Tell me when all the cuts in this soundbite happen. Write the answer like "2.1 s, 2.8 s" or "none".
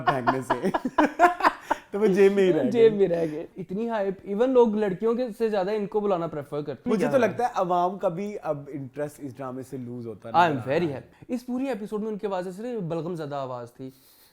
3.6 s, 6.9 s, 11.1 s